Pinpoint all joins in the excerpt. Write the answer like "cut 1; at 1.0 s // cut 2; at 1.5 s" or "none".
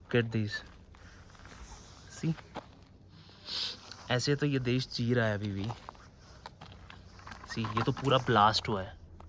none